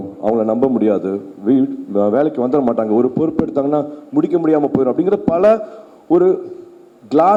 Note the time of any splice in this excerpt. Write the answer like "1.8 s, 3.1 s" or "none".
none